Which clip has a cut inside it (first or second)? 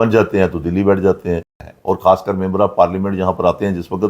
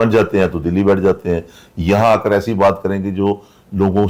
first